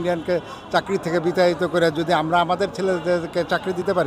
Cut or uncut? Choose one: uncut